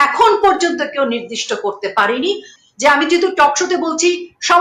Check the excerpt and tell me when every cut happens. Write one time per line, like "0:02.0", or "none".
0:02.6